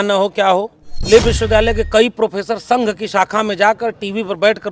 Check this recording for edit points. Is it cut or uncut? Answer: cut